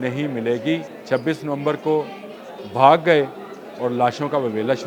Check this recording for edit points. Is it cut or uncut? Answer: cut